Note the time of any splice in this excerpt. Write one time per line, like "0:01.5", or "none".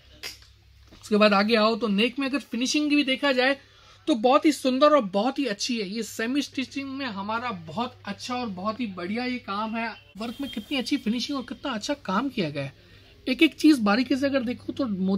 0:10.2